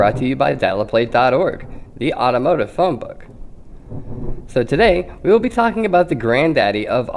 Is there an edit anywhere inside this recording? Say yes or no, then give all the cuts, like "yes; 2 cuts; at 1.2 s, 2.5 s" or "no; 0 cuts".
yes; 1 cut; at 1.7 s